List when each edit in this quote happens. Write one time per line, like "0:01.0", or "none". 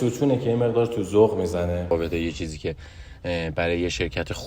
0:01.9